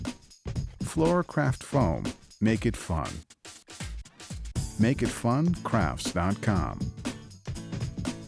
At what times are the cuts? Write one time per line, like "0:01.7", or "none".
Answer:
0:00.9
0:06.8